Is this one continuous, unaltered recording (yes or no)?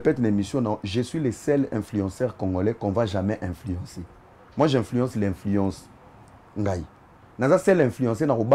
yes